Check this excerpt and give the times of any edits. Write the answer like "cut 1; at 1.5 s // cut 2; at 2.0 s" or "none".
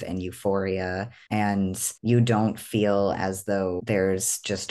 cut 1; at 1.1 s // cut 2; at 1.9 s // cut 3; at 3.8 s